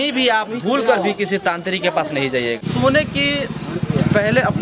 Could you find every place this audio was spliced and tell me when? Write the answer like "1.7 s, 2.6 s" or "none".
2.6 s